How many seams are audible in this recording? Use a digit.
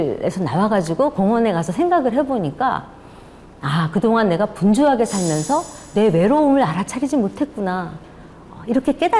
0